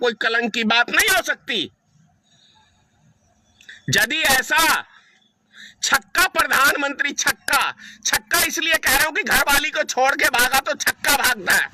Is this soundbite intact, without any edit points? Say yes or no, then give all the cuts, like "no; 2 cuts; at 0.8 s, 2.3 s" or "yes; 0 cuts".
yes; 0 cuts